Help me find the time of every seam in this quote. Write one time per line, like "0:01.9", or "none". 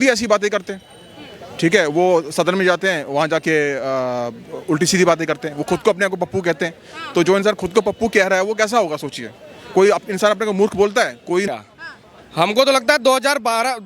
0:11.5